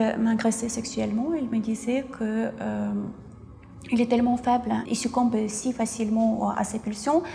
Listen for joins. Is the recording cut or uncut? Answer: cut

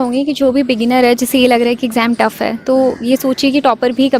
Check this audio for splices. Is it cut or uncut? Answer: uncut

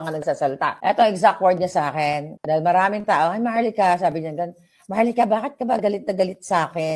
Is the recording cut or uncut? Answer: cut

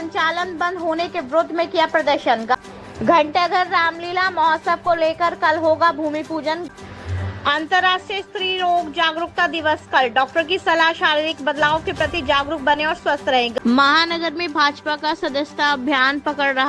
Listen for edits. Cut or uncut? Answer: cut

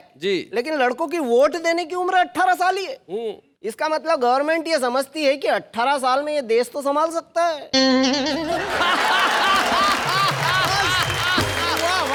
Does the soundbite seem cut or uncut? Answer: uncut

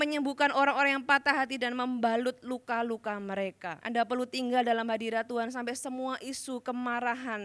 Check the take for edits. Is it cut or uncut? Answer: cut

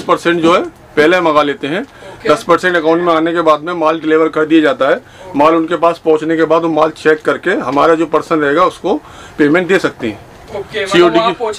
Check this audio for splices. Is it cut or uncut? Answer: uncut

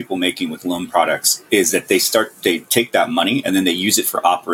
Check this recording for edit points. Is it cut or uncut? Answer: uncut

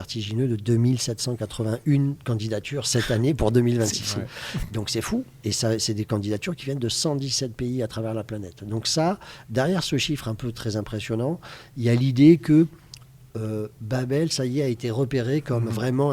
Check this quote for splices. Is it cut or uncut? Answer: uncut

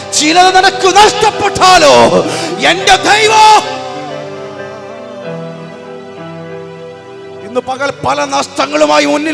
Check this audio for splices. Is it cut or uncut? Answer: uncut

